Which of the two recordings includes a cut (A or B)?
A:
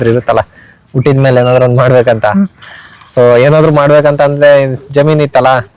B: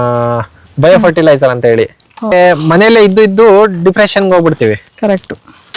B